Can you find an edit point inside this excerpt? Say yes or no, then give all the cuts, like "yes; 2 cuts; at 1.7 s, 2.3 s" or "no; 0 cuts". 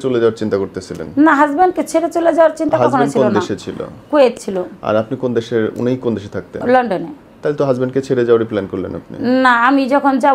no; 0 cuts